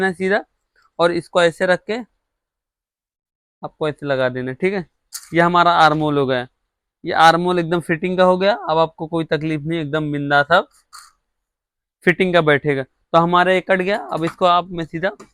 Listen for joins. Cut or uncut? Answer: uncut